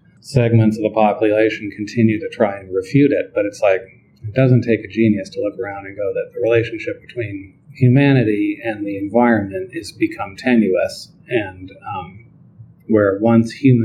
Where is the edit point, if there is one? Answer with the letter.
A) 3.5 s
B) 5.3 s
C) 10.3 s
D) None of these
D